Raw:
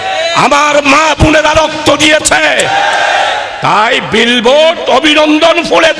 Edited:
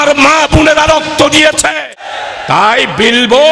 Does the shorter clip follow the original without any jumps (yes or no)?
no